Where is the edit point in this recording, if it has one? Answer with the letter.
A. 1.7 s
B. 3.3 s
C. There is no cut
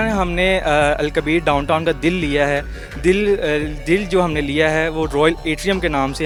C